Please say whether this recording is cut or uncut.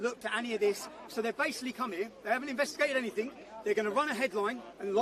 uncut